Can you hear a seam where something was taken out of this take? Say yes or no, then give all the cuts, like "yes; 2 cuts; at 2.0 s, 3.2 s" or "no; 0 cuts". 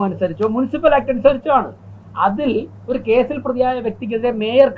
no; 0 cuts